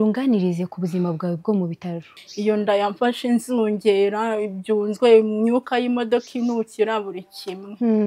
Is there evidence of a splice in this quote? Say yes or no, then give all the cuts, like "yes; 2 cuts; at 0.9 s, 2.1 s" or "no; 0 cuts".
yes; 1 cut; at 2.2 s